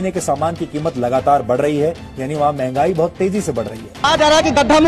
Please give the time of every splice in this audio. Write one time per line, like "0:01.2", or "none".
0:03.9